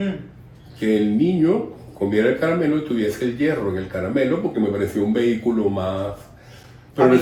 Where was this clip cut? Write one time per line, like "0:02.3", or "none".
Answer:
none